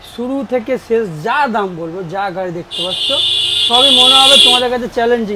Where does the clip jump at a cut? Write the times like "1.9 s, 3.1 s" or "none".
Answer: none